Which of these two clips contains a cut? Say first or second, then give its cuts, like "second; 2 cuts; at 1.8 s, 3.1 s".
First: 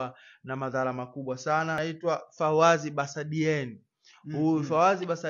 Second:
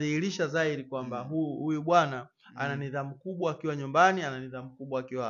first; 1 cut; at 1.8 s